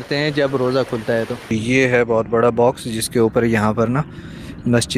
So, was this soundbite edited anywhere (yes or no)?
yes